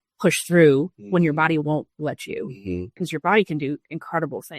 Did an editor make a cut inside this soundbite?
yes; 1 cut; at 3.0 s

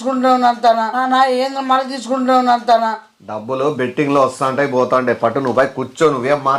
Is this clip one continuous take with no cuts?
no; 2 cuts; at 1.0 s, 2.9 s

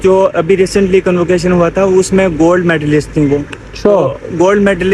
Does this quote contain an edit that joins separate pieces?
no; 0 cuts

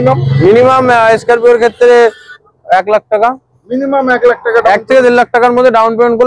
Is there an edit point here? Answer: no; 0 cuts

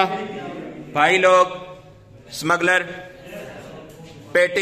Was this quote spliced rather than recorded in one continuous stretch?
no; 0 cuts

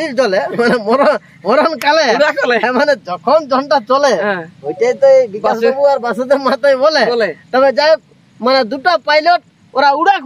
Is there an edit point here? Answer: no; 0 cuts

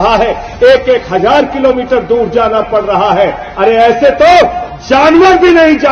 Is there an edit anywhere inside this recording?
no; 0 cuts

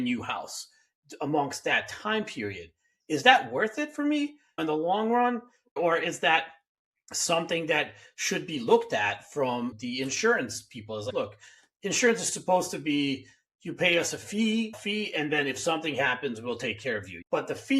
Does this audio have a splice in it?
no; 0 cuts

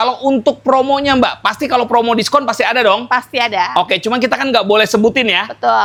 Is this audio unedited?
yes; 0 cuts

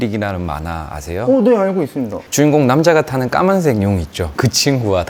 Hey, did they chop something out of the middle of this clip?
no; 0 cuts

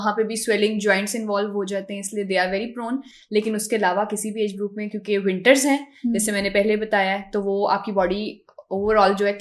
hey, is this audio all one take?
yes; 0 cuts

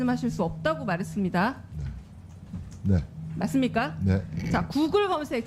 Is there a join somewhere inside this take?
no; 0 cuts

